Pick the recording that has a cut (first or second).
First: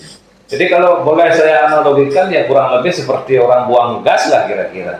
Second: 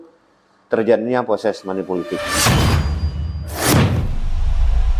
second